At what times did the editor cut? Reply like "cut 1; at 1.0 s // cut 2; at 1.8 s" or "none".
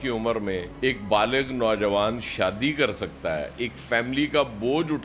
none